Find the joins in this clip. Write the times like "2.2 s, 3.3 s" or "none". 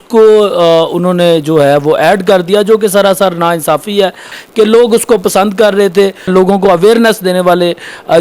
4.4 s, 6.3 s